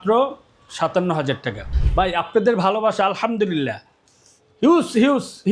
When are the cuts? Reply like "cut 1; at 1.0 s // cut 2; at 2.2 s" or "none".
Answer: cut 1; at 1.7 s

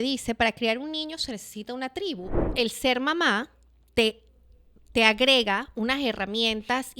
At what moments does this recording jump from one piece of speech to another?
cut 1; at 2.4 s

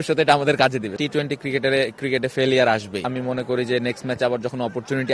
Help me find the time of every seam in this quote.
cut 1; at 1.0 s // cut 2; at 3.0 s

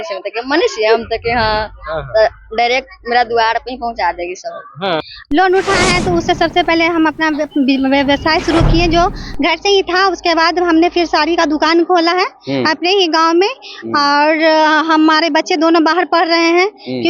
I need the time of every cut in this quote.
cut 1; at 5.0 s

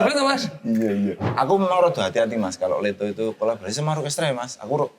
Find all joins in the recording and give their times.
cut 1; at 1.2 s

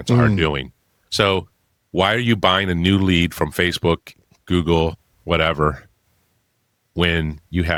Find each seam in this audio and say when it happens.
none

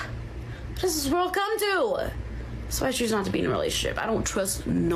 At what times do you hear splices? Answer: none

